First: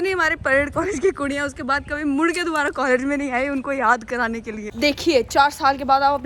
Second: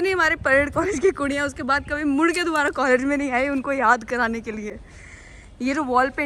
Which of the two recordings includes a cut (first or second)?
first